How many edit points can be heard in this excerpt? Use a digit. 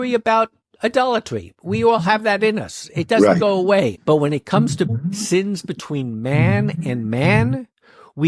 2